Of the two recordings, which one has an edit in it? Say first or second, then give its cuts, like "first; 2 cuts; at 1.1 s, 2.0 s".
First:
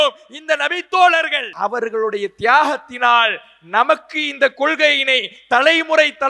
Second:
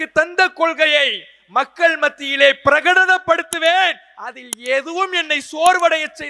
first; 1 cut; at 1.4 s